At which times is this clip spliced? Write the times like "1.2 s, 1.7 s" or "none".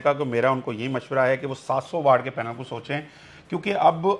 none